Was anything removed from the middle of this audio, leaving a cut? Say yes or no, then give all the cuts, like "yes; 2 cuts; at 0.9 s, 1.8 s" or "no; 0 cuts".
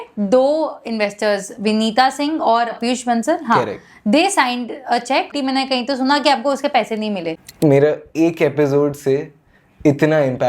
yes; 3 cuts; at 2.8 s, 5.3 s, 7.3 s